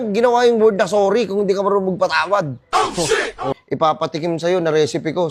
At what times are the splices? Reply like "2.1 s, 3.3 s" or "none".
3.5 s